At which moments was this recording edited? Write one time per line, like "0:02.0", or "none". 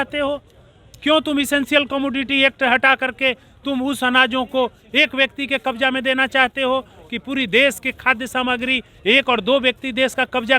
none